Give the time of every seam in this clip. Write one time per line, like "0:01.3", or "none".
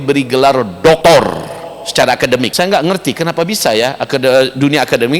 0:01.0
0:02.5